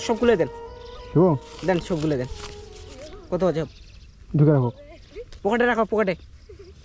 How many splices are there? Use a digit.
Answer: 0